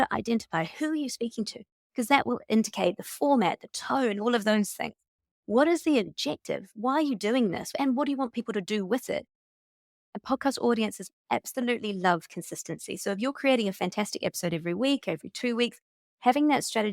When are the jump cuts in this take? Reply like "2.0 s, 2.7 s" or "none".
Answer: 2.2 s, 7.8 s, 9.5 s